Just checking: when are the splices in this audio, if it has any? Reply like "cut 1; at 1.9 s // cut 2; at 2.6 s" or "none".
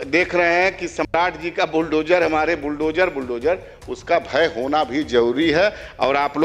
none